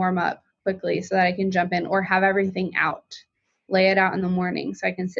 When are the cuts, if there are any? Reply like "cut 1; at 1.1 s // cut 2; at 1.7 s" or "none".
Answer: none